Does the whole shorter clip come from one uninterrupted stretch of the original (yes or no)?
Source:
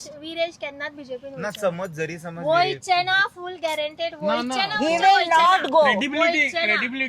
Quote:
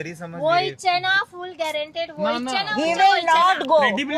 yes